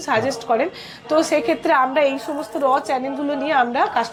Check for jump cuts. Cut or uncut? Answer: uncut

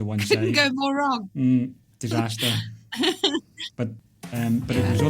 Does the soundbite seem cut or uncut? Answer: cut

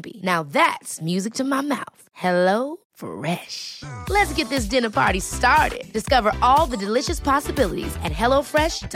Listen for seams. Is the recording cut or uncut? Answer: uncut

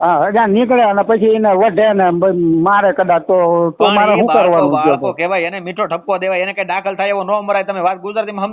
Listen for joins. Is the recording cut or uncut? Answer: uncut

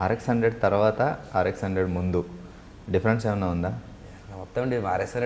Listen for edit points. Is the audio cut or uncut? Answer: uncut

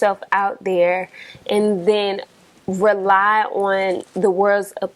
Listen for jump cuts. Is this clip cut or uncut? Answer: uncut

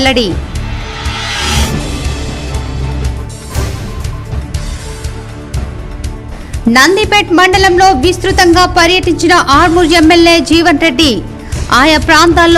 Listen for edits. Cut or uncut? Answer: uncut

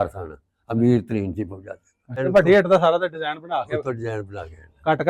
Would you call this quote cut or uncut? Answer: cut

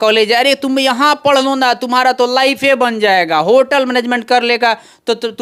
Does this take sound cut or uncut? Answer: uncut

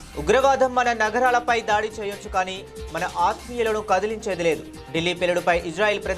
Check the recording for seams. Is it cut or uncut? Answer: uncut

